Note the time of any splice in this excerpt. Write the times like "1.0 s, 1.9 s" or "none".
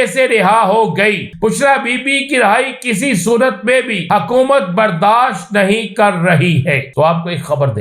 1.3 s, 4.0 s, 6.9 s